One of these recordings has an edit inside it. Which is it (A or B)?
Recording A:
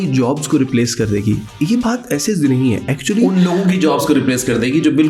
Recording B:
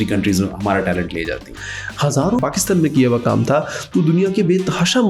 B